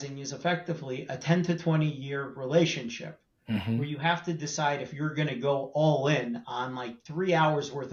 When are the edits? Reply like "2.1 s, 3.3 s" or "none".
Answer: none